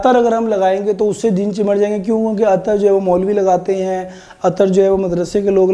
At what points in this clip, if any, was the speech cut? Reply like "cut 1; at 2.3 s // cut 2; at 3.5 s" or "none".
none